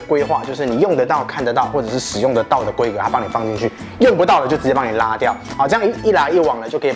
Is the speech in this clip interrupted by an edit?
no; 0 cuts

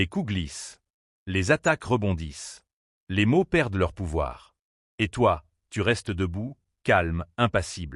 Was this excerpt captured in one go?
yes; 0 cuts

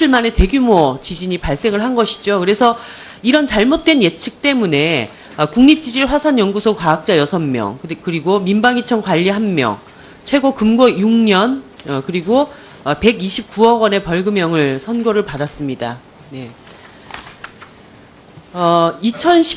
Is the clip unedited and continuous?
no; 1 cut; at 12.5 s

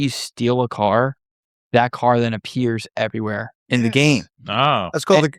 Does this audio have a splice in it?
no; 0 cuts

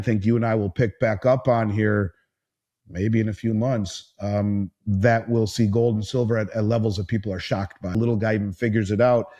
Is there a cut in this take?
yes; 1 cut; at 7.9 s

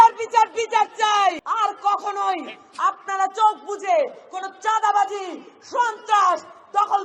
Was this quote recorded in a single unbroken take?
no; 1 cut; at 1.4 s

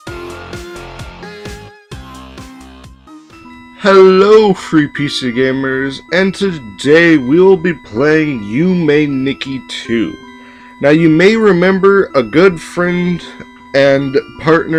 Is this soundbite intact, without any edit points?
yes; 0 cuts

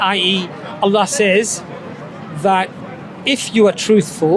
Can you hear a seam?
no; 0 cuts

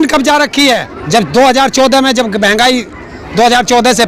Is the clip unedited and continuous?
no; 1 cut; at 0.9 s

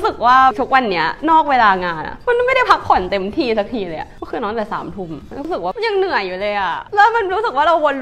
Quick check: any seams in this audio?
no; 0 cuts

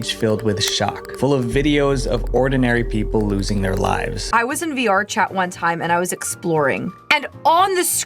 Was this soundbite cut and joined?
yes; 2 cuts; at 4.2 s, 6.9 s

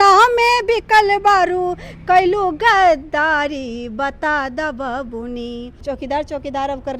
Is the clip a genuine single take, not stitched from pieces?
no; 1 cut; at 5.7 s

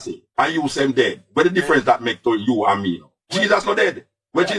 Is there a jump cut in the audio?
no; 0 cuts

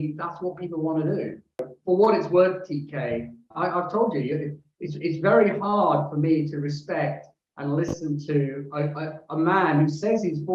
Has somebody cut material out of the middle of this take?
yes; 2 cuts; at 1.5 s, 3.5 s

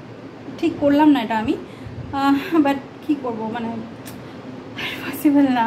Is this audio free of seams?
yes; 0 cuts

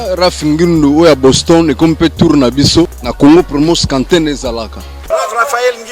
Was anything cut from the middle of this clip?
yes; 2 cuts; at 3.0 s, 5.0 s

